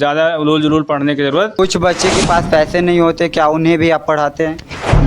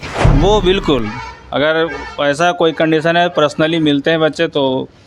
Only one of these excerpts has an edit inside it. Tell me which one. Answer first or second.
first